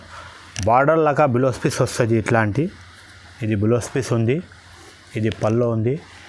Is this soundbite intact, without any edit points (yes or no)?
yes